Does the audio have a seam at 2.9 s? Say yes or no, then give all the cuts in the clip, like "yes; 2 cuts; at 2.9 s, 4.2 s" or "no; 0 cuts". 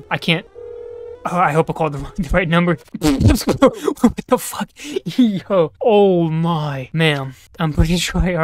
yes; 1 cut; at 2.9 s